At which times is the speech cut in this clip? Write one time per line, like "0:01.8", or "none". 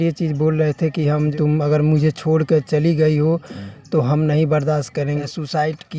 0:01.3
0:05.2